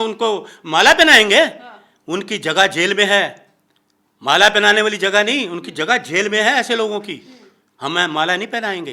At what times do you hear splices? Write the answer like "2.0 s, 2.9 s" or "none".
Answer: none